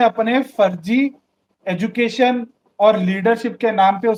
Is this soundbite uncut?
yes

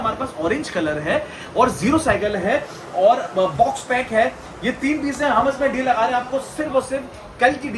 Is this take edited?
no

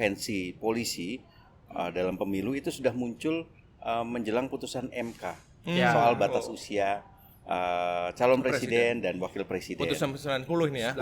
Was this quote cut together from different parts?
no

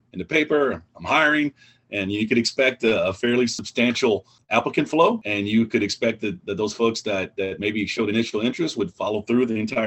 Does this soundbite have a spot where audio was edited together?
yes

